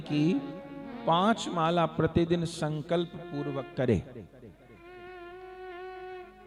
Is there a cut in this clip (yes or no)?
no